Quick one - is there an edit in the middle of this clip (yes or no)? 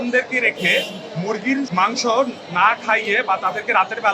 no